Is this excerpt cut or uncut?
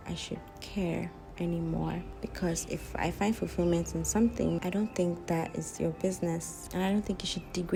uncut